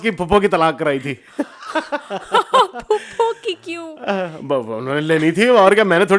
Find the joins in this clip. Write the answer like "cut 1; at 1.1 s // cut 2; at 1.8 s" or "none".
none